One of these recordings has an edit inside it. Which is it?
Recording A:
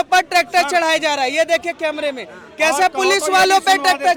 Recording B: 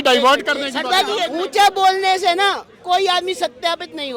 B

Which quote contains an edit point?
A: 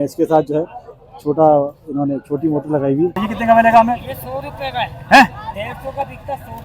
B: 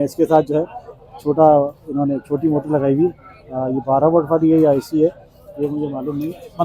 A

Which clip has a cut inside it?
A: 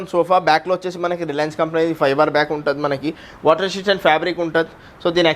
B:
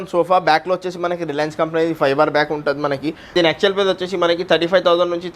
B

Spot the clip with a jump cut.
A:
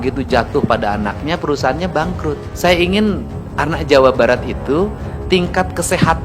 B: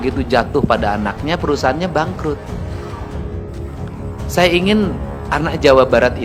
A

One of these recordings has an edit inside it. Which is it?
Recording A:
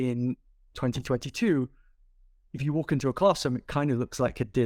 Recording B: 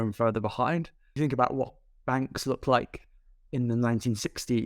B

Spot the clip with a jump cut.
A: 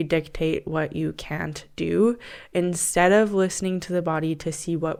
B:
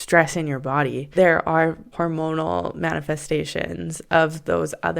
B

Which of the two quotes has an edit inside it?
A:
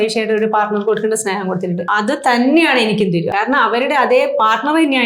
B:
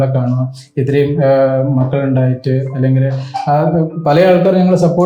A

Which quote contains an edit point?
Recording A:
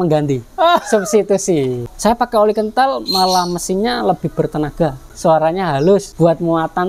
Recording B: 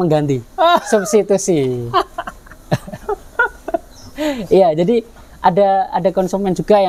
A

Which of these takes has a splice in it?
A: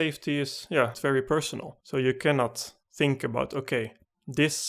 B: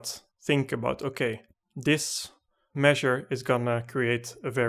A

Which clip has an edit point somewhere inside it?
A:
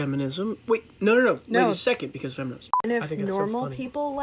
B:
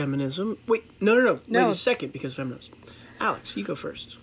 A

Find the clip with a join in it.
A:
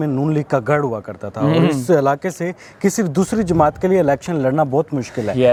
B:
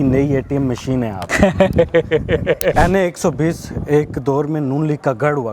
B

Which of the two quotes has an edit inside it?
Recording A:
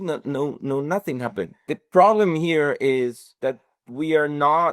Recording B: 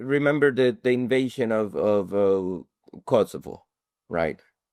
A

